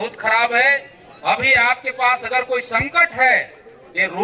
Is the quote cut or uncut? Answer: uncut